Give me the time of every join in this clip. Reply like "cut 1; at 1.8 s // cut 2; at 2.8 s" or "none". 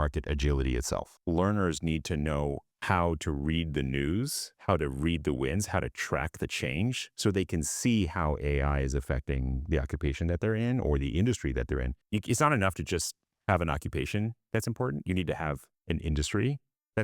cut 1; at 1.1 s // cut 2; at 2.7 s // cut 3; at 12.0 s